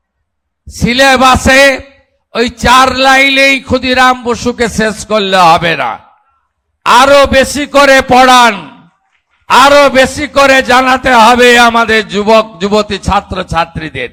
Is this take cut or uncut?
uncut